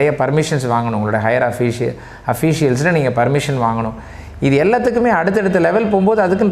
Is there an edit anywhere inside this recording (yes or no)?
no